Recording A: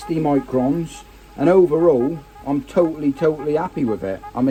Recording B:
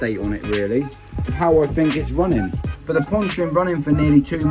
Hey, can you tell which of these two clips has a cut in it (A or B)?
B